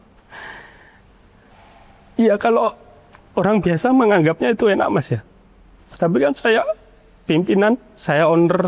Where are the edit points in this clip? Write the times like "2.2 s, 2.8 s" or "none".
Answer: none